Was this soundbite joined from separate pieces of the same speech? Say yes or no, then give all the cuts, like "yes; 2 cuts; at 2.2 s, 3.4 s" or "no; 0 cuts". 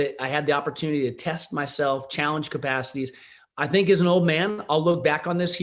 no; 0 cuts